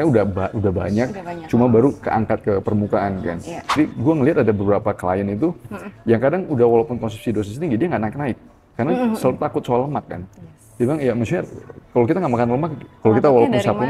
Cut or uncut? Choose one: cut